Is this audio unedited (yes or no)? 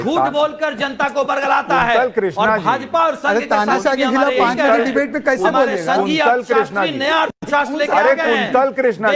yes